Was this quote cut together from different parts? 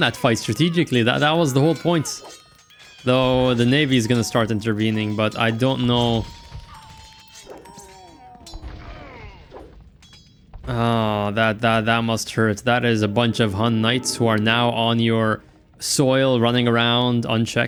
no; 0 cuts

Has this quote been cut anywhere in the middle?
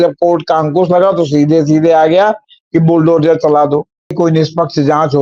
yes; 1 cut; at 4.1 s

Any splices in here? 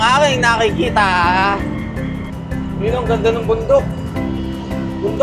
no; 0 cuts

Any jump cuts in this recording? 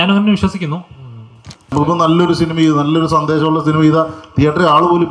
yes; 1 cut; at 1.7 s

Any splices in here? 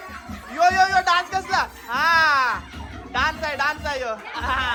no; 0 cuts

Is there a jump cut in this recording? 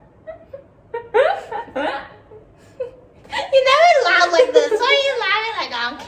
no; 0 cuts

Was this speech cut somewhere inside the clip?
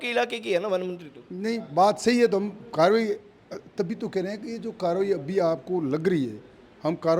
no; 0 cuts

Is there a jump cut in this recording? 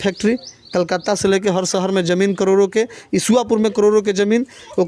no; 0 cuts

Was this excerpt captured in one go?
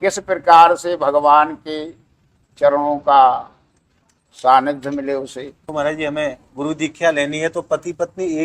no; 1 cut; at 5.6 s

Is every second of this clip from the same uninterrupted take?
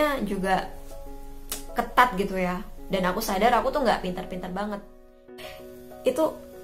no; 1 cut; at 5.4 s

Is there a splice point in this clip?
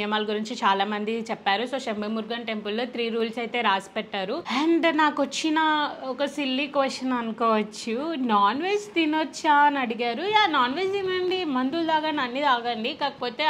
yes; 1 cut; at 4.4 s

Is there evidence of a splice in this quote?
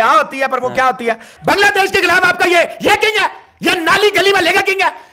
yes; 1 cut; at 1.3 s

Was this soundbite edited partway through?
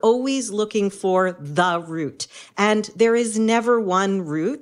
no; 0 cuts

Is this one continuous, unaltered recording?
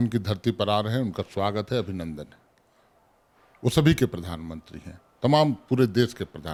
yes; 0 cuts

